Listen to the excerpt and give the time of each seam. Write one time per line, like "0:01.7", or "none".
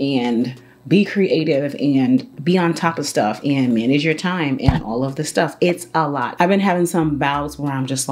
0:06.3